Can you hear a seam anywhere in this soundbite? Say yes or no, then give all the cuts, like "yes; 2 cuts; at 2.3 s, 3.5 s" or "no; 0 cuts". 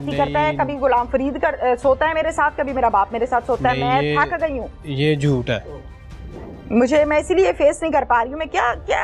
no; 0 cuts